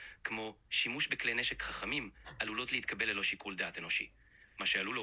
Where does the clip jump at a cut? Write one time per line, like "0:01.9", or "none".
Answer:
none